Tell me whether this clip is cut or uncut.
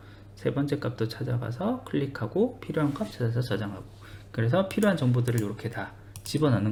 uncut